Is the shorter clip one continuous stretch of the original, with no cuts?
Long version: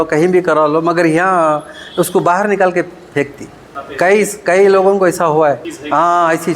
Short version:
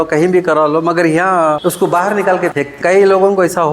no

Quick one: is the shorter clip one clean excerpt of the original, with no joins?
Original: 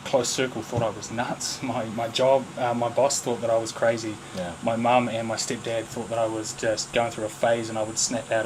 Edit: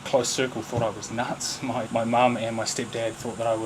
no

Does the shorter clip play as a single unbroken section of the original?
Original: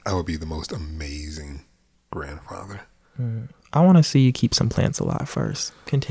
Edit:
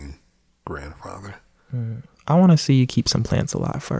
yes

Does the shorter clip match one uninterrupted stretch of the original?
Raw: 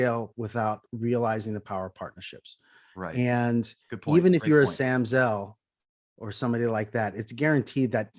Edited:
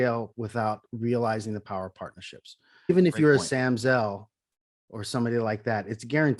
no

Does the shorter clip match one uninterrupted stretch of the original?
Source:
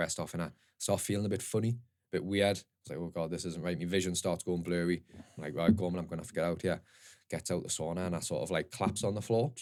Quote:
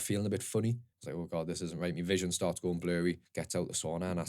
no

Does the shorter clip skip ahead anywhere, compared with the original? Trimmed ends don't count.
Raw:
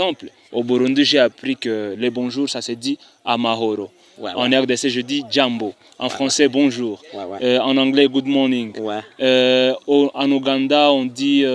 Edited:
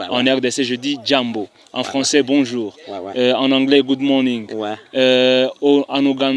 no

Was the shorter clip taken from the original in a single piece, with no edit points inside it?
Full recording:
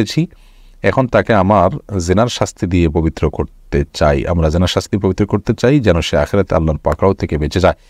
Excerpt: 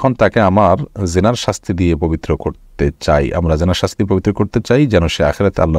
yes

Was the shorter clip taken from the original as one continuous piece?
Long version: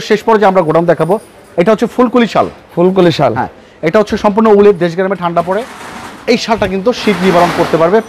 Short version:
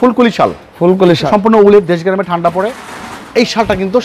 no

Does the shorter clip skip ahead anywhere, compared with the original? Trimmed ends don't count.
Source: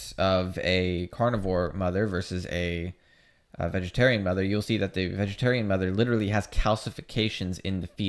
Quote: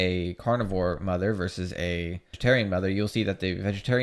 yes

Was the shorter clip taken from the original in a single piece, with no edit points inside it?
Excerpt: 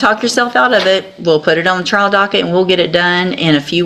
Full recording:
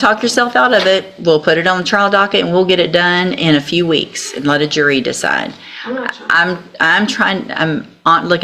yes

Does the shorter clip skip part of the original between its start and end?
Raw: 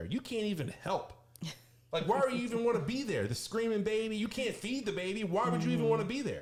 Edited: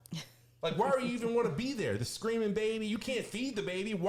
no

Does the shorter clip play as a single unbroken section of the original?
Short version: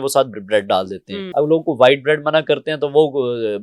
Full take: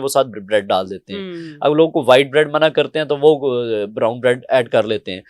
no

